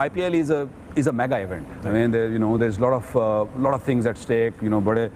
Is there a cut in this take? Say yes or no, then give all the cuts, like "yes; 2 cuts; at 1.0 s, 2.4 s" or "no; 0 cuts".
no; 0 cuts